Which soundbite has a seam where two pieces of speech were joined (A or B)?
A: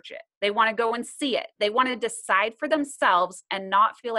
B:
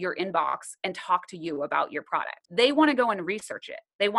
B